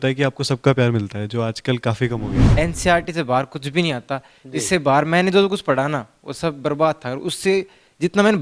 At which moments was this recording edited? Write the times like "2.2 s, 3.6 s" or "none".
2.4 s